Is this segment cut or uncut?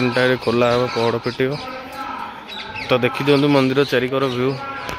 uncut